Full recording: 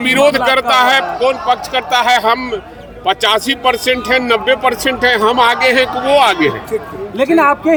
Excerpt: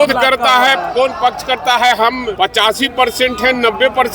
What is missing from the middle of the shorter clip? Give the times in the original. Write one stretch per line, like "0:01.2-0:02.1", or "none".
0:02.6-0:03.0